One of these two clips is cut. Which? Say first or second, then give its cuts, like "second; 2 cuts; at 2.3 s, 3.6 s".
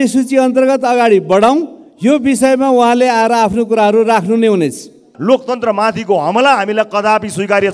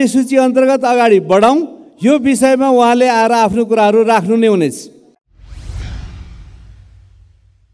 first; 1 cut; at 5.1 s